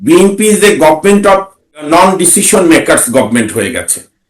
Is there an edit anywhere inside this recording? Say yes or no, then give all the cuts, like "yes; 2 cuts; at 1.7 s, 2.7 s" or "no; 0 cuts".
yes; 1 cut; at 1.9 s